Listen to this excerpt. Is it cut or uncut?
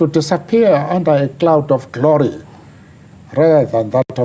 uncut